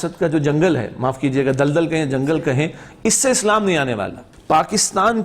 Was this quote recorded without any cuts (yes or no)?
no